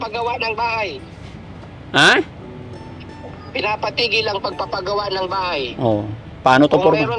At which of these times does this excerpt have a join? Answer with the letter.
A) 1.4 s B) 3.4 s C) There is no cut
C